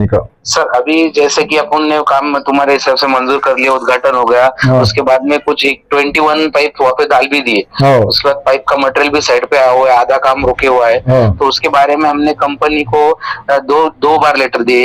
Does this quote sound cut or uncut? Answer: uncut